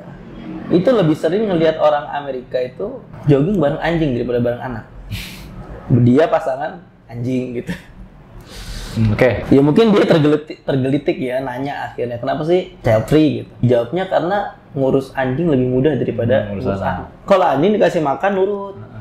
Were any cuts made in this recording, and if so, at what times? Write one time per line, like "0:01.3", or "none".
0:03.1
0:09.4
0:12.7
0:13.6
0:17.1